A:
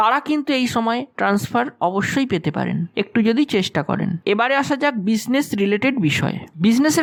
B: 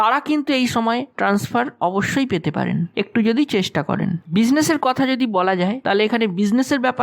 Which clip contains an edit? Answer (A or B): B